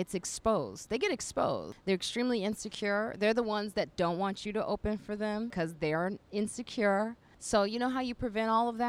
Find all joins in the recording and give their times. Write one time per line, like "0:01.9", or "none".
0:01.7
0:05.7
0:07.2